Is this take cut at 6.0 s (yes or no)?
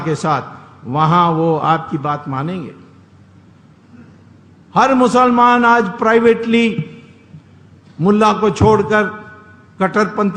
no